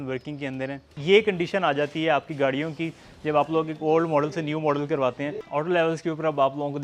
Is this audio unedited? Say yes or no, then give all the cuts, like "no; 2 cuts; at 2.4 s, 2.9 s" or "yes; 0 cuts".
no; 2 cuts; at 0.9 s, 5.4 s